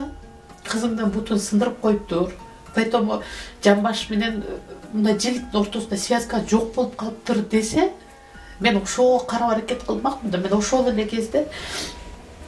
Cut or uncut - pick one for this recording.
uncut